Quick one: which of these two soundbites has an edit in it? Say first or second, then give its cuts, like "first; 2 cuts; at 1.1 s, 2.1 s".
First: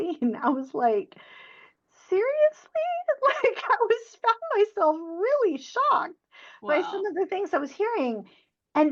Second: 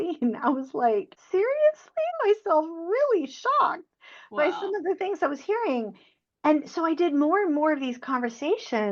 second; 2 cuts; at 1.2 s, 2.1 s